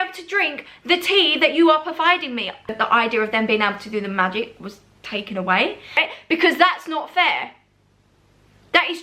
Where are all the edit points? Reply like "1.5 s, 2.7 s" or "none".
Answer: 2.8 s, 6.1 s